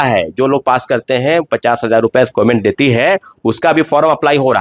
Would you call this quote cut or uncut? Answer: uncut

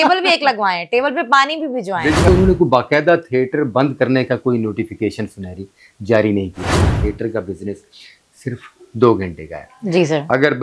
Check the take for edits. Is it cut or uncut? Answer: cut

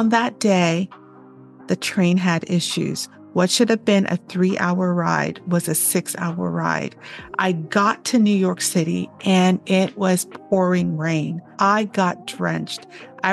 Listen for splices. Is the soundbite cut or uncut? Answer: cut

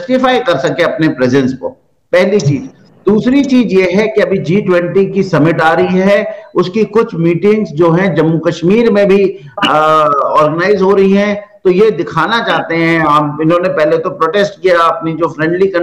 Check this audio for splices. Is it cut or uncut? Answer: uncut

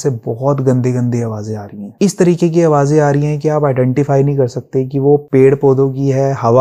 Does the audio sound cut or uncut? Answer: uncut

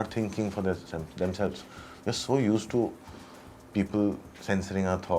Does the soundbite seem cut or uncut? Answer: uncut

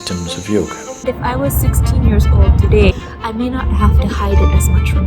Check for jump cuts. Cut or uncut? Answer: cut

